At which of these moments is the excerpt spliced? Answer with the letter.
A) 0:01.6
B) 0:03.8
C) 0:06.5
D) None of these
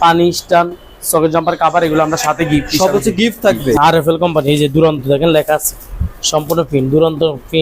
B